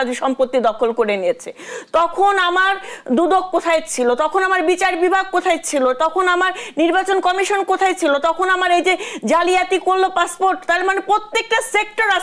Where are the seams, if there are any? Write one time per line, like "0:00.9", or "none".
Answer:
none